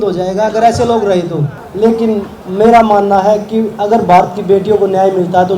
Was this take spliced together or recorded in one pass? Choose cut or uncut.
cut